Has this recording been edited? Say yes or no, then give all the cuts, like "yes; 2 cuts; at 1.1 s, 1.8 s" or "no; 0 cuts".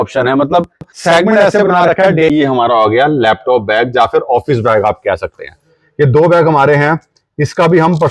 yes; 1 cut; at 2.3 s